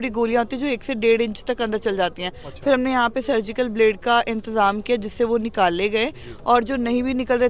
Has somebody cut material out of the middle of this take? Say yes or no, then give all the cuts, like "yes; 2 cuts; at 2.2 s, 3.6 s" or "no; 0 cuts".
no; 0 cuts